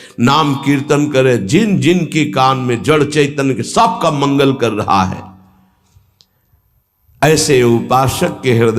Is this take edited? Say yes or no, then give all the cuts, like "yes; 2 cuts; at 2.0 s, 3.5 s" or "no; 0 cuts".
no; 0 cuts